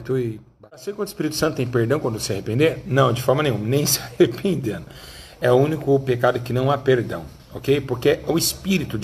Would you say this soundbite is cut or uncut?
cut